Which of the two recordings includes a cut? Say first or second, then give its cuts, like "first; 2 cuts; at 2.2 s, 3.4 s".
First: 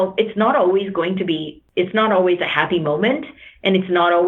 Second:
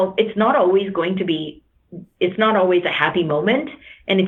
first; 1 cut; at 1.6 s